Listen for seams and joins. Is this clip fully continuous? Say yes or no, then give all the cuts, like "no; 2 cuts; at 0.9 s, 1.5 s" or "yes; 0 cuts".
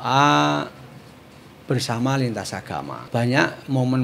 no; 1 cut; at 3.0 s